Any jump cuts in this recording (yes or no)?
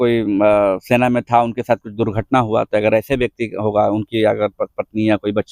no